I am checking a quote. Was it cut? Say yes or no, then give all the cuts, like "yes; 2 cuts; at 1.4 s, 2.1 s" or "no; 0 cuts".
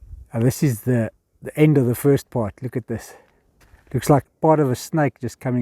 yes; 1 cut; at 4.3 s